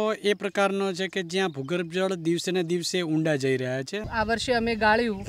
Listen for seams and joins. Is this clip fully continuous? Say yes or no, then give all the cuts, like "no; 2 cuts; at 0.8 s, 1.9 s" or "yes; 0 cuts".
no; 1 cut; at 4.0 s